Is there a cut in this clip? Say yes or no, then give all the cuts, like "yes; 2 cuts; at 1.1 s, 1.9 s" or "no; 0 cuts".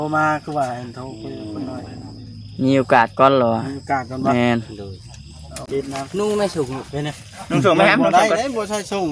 yes; 1 cut; at 5.6 s